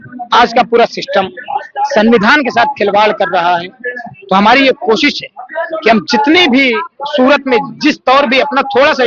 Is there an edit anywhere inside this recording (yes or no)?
no